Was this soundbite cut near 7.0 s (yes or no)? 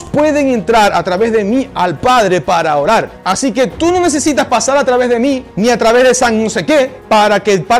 yes